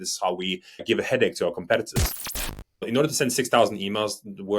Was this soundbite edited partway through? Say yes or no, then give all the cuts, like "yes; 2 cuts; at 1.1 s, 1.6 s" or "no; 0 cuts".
yes; 2 cuts; at 0.8 s, 2.5 s